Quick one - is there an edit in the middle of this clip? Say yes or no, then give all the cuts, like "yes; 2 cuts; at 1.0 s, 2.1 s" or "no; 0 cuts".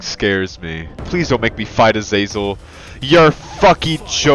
yes; 1 cut; at 1.0 s